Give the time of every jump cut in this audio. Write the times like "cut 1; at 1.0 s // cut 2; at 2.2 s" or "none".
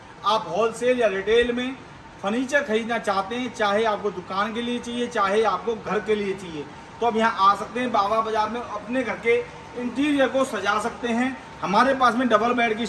none